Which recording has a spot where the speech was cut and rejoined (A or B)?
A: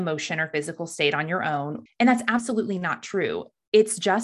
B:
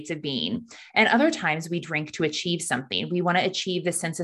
A